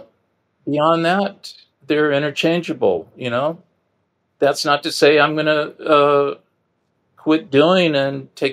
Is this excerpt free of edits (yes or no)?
yes